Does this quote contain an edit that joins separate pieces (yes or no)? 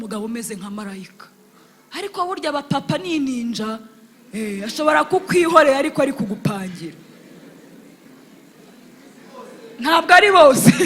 no